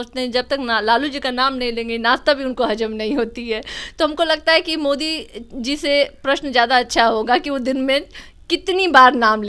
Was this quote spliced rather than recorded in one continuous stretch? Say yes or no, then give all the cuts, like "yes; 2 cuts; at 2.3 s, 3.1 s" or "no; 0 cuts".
no; 0 cuts